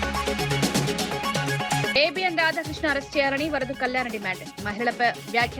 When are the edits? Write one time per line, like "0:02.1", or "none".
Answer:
0:01.9